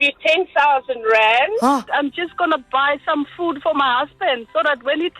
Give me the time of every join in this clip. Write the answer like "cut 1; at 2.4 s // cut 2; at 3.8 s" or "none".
cut 1; at 1.9 s